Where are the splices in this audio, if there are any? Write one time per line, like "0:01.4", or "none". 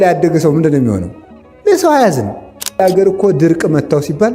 0:02.8